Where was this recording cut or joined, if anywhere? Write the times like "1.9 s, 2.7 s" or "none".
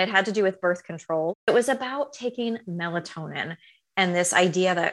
1.5 s